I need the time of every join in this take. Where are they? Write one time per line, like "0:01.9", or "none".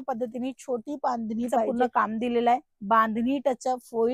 0:01.7